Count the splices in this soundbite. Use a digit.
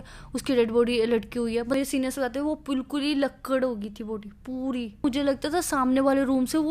2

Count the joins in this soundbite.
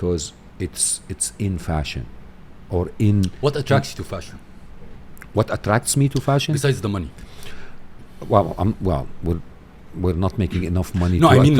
0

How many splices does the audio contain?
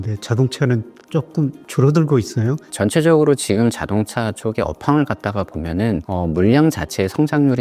1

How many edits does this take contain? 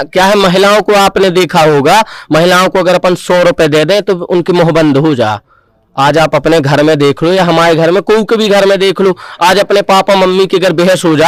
0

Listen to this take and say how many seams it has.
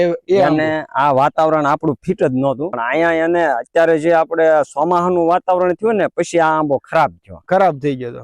1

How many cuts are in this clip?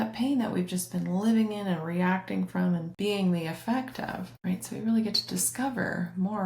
2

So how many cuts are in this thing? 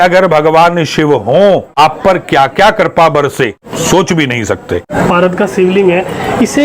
3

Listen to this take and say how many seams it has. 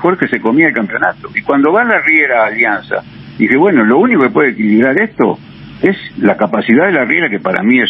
0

